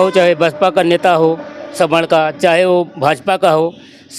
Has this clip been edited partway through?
no; 0 cuts

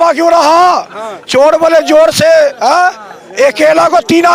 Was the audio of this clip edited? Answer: no; 0 cuts

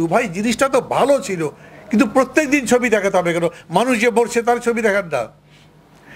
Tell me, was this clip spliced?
no; 0 cuts

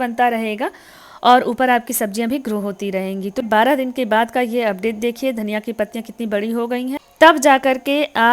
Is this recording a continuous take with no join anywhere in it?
no; 2 cuts; at 3.4 s, 7.0 s

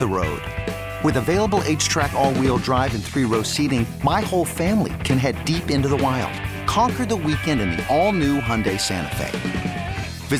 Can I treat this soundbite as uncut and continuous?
yes; 0 cuts

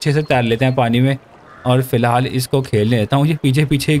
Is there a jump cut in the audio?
no; 0 cuts

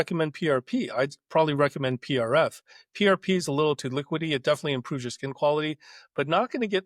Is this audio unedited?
yes; 0 cuts

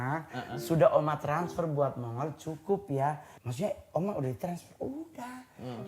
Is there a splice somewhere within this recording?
yes; 1 cut; at 3.3 s

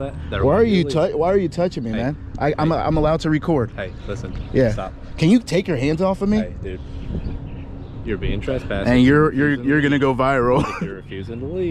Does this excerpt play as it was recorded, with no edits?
no; 1 cut; at 1.4 s

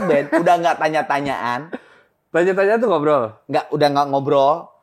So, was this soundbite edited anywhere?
no; 0 cuts

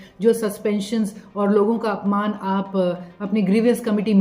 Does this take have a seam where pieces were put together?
no; 0 cuts

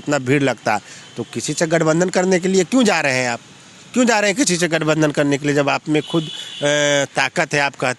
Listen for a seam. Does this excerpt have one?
no; 0 cuts

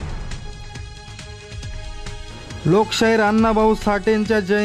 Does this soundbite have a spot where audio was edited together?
yes; 1 cut; at 1.3 s

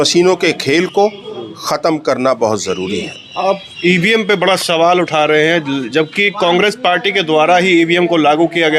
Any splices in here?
no; 0 cuts

